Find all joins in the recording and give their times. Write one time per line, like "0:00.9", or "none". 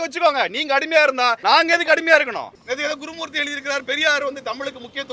0:01.4
0:02.6